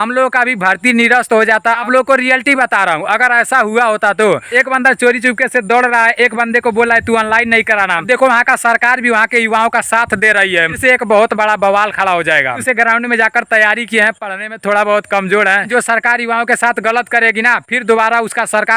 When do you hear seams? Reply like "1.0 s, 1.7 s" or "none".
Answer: 1.8 s, 4.5 s, 8.0 s, 10.8 s, 12.6 s, 15.7 s